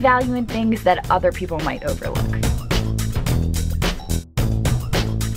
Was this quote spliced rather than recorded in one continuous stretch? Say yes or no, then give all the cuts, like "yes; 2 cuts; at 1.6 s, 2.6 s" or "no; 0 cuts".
no; 0 cuts